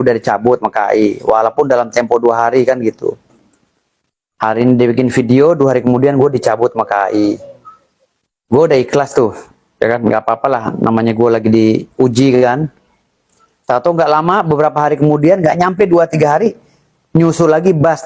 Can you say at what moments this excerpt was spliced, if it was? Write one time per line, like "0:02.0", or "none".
none